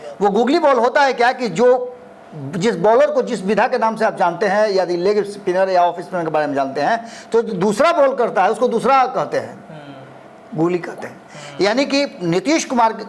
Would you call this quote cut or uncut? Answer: uncut